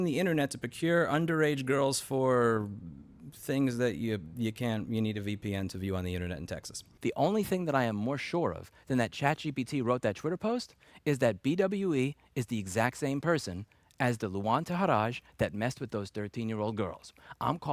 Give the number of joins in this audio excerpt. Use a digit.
1